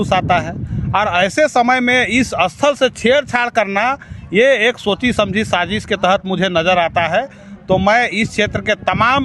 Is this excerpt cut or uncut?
uncut